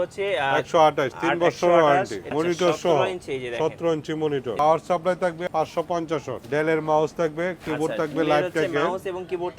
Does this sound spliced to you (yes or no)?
yes